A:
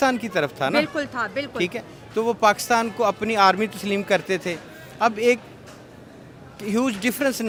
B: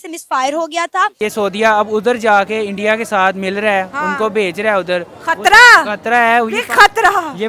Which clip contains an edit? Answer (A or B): B